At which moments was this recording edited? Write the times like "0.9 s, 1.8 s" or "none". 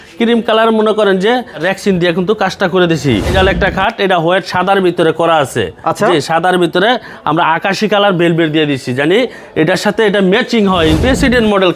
1.6 s, 3.3 s, 11.0 s